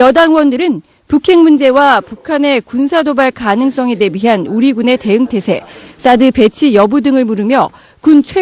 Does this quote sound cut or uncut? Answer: uncut